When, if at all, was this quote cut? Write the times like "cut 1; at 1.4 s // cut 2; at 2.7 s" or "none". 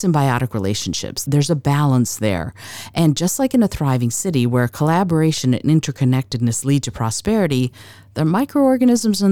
cut 1; at 1.1 s